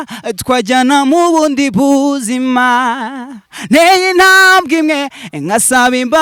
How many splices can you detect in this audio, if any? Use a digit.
0